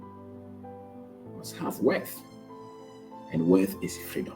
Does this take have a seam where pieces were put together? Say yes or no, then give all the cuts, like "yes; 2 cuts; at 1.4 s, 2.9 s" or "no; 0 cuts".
yes; 1 cut; at 1.3 s